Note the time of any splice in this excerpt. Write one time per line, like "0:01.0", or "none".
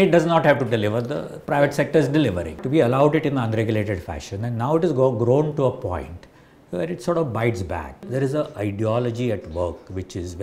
0:02.6
0:08.1